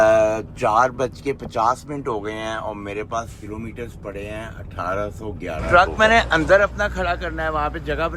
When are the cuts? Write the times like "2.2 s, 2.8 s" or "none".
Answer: 5.6 s